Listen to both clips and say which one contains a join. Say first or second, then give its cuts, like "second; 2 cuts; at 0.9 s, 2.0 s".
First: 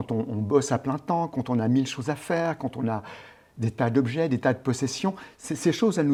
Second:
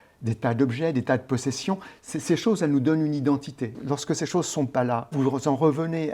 second; 2 cuts; at 3.8 s, 5.1 s